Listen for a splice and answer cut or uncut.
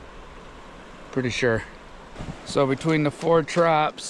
cut